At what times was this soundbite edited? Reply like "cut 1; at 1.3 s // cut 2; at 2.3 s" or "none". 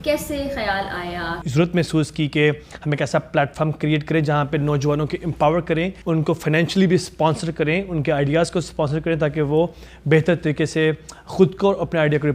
cut 1; at 1.4 s // cut 2; at 6.0 s